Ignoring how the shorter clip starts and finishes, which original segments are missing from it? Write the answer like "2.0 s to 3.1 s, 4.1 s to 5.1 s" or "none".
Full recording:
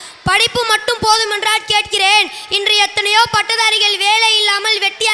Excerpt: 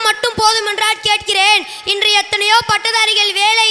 none